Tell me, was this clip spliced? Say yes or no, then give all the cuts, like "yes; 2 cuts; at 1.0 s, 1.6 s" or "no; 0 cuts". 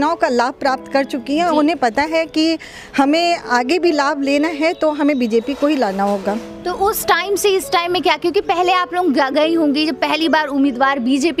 no; 0 cuts